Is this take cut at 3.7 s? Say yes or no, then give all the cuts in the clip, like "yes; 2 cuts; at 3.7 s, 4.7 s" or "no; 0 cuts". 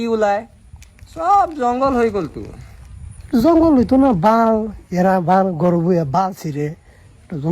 no; 0 cuts